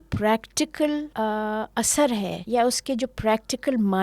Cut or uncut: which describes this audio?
cut